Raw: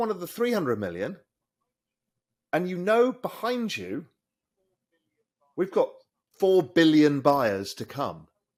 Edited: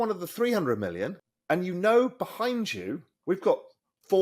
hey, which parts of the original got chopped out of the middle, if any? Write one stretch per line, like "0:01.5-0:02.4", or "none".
0:01.3-0:02.3
0:04.1-0:05.4